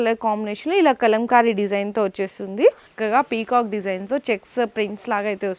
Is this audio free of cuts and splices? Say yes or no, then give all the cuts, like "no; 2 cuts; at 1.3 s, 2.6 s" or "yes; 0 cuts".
no; 1 cut; at 2.9 s